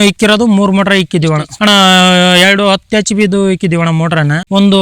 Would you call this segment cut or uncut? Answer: cut